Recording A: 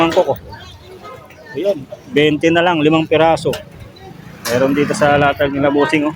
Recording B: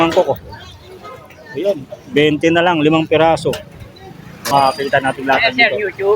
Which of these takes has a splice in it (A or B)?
B